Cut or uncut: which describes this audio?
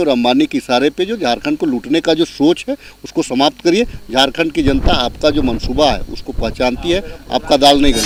uncut